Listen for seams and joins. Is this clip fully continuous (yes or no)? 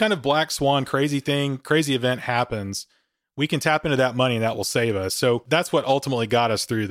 no